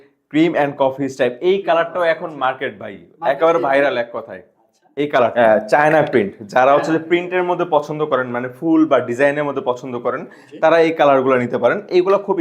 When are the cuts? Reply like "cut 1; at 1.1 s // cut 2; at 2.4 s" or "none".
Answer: cut 1; at 5.3 s